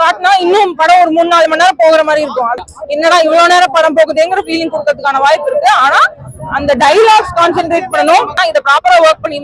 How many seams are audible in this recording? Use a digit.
2